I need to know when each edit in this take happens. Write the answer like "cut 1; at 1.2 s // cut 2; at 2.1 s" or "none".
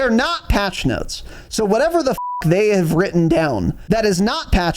cut 1; at 3.8 s